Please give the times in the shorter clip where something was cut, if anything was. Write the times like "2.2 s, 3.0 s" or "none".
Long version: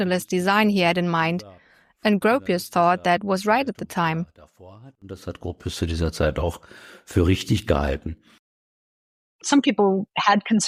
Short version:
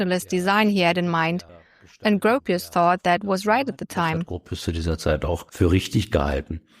4.4 s, 5.5 s